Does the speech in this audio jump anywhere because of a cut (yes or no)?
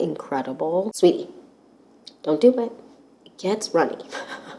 yes